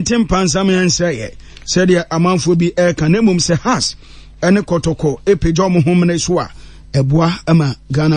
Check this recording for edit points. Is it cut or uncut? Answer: uncut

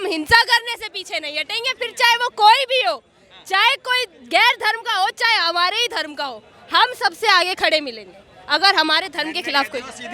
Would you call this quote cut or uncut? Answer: uncut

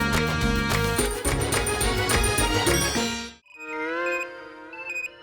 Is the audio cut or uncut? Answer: cut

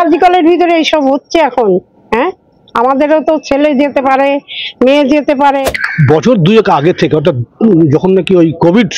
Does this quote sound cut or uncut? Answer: cut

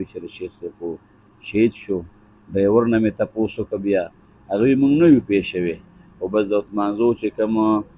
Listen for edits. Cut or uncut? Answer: uncut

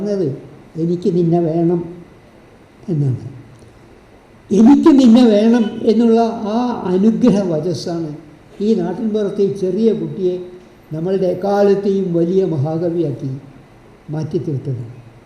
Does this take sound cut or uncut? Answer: uncut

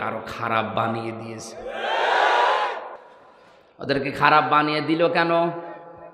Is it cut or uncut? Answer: uncut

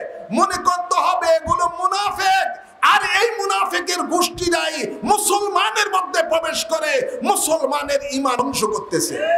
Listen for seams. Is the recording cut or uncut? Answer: cut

